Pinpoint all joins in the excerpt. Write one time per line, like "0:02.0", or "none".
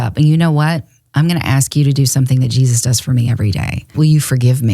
0:03.8

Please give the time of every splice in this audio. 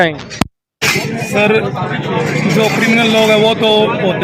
none

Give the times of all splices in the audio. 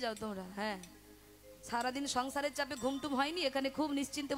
none

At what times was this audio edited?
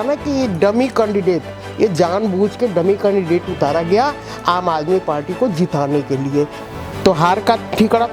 0:06.6

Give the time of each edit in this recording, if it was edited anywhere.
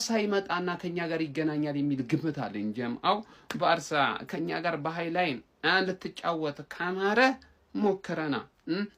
none

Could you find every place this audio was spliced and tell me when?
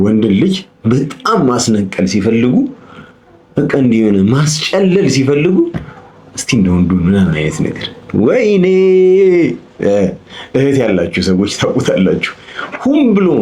none

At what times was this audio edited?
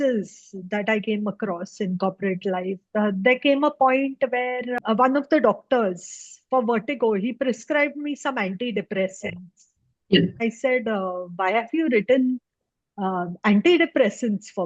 0:04.8
0:10.4

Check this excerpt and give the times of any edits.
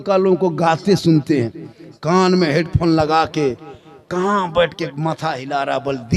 none

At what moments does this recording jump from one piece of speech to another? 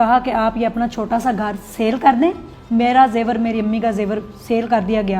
0:02.5

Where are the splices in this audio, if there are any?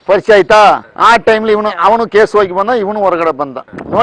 none

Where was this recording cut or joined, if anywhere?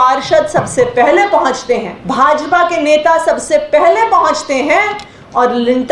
0:02.0

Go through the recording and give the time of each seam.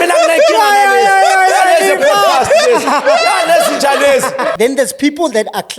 0:04.5

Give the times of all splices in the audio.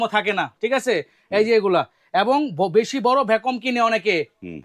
none

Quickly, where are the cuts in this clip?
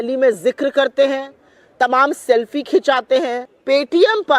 0:03.5

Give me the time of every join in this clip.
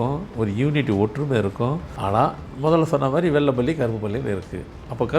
0:01.9

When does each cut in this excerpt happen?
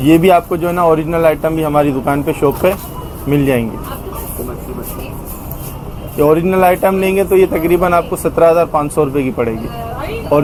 none

